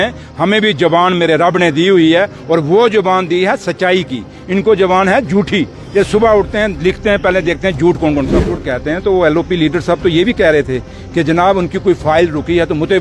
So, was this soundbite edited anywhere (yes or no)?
yes